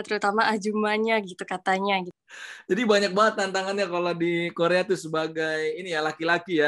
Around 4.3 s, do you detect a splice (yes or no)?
no